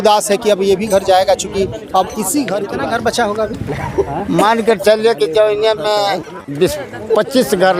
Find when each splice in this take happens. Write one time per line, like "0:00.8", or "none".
0:02.7